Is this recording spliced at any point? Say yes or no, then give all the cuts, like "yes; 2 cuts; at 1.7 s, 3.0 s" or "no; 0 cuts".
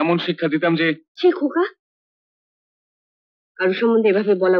no; 0 cuts